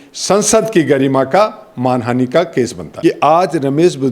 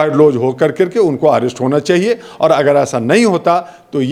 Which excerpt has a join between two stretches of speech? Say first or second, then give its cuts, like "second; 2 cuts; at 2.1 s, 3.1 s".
first; 1 cut; at 2.8 s